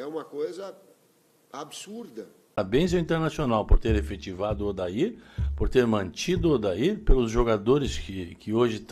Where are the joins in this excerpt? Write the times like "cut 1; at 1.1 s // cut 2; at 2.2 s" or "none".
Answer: cut 1; at 2.4 s